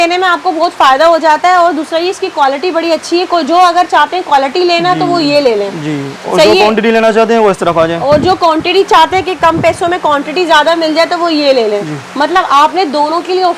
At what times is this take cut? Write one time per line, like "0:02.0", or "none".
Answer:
none